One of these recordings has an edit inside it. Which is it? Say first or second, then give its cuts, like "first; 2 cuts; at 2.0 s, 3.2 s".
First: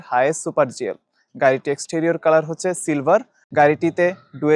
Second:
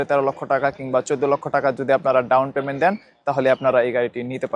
first; 1 cut; at 3.4 s